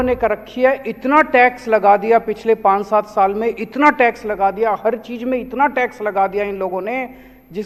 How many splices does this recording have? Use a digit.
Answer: 0